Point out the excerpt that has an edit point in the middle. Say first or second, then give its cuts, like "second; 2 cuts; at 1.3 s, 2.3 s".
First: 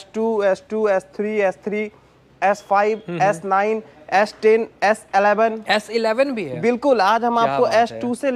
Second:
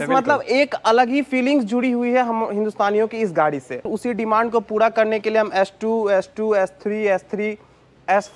second; 1 cut; at 3.9 s